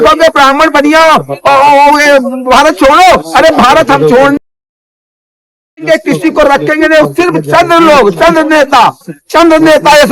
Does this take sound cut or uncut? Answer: uncut